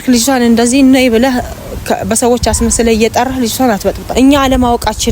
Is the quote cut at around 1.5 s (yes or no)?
no